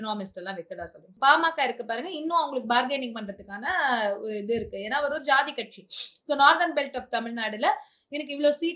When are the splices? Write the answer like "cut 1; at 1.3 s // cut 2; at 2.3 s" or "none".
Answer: cut 1; at 1.0 s